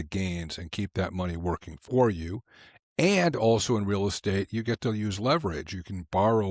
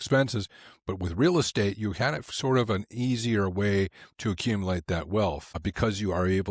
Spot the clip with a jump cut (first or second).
second